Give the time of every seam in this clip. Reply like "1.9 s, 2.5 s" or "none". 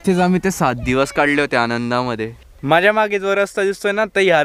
2.3 s